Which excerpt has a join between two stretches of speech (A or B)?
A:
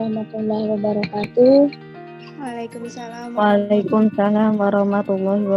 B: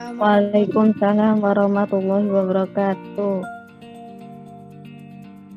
B